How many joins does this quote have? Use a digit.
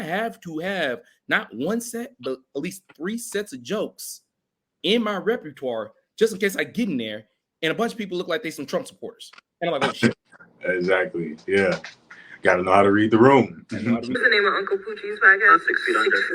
1